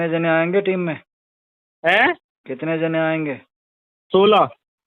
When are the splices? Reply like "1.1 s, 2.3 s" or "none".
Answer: none

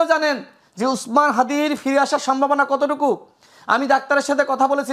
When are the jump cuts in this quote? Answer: none

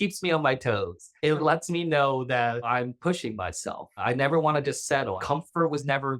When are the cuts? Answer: 1.4 s, 2.7 s, 4.0 s, 5.2 s

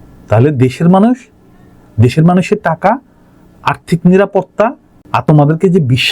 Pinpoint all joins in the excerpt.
5.2 s

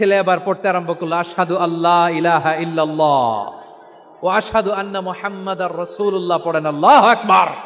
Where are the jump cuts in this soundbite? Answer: none

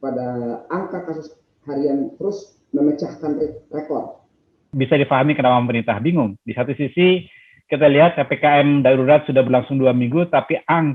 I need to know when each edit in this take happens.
4.7 s

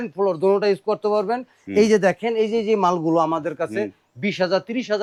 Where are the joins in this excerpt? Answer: none

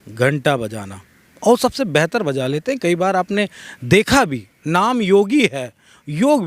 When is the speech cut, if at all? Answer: none

